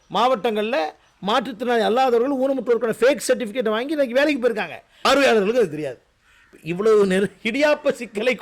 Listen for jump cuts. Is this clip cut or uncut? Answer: cut